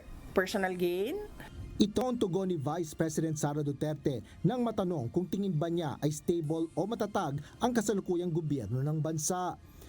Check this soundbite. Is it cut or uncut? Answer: cut